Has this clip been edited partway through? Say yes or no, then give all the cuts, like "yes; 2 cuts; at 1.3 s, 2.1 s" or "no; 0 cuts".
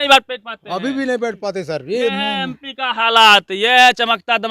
no; 0 cuts